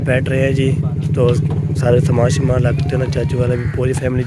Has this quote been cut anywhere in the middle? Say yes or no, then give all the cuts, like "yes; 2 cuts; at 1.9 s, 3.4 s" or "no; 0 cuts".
no; 0 cuts